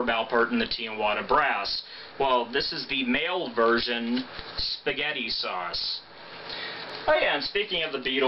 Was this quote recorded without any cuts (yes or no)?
yes